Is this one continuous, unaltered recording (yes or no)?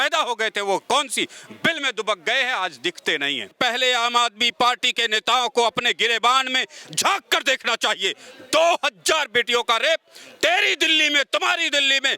no